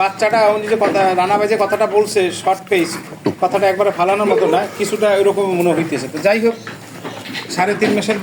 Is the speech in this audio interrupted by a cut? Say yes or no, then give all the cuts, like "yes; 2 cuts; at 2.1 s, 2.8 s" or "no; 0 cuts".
no; 0 cuts